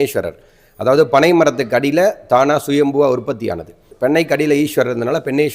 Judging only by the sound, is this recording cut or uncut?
cut